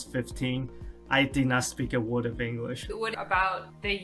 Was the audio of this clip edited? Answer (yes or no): yes